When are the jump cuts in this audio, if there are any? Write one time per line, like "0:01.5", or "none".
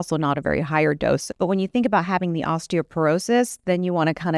0:01.3